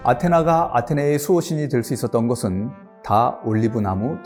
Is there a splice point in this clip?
no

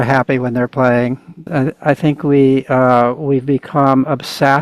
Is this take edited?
yes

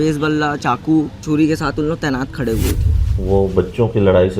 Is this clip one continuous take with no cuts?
no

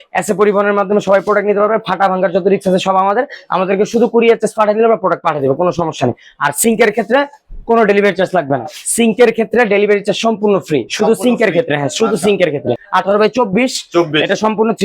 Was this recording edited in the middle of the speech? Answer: yes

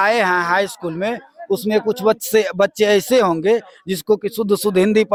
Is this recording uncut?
yes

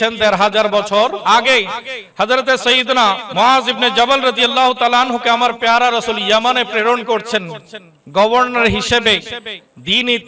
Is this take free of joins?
no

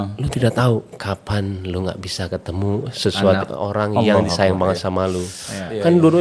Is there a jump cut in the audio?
no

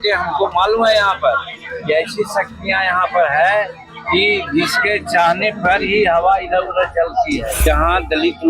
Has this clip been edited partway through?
yes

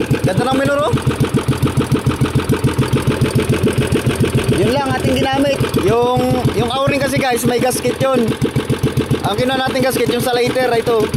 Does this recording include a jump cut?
no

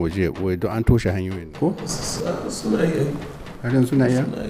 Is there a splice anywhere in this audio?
no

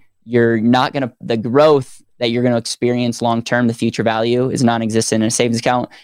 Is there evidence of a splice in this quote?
yes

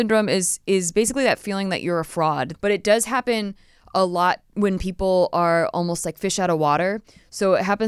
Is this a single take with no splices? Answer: no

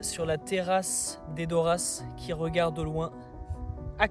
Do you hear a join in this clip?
no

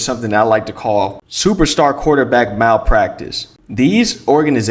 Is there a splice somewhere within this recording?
no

